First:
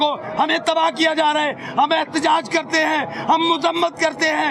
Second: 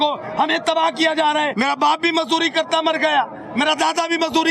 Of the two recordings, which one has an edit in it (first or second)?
second